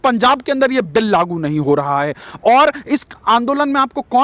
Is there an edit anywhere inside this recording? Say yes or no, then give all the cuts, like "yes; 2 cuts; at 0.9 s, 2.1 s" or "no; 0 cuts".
no; 0 cuts